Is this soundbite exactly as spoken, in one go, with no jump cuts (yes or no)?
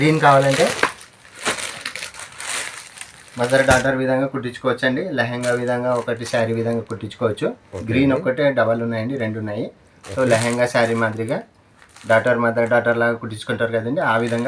yes